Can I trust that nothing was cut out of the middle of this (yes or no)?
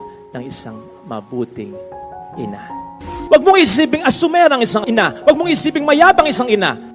no